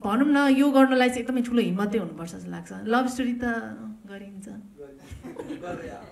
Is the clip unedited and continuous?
yes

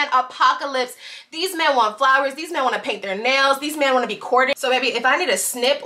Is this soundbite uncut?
no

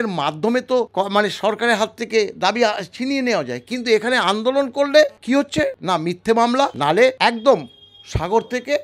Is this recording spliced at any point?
yes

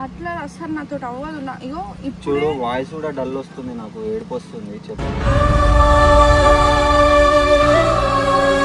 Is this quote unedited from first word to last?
yes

